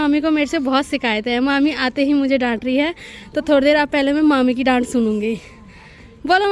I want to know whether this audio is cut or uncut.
uncut